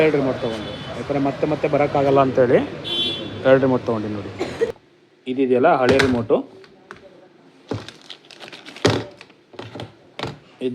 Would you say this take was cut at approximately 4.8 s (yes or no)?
yes